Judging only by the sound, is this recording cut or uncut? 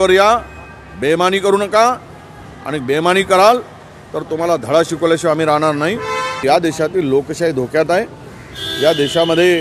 cut